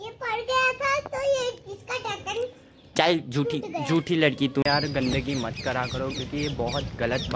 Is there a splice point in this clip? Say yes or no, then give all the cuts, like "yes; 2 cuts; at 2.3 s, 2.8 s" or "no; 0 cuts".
yes; 1 cut; at 4.6 s